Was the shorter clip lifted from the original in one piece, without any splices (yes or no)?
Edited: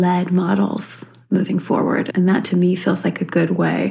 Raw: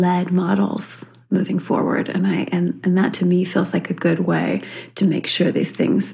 no